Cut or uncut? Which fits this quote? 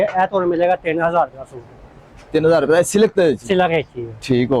uncut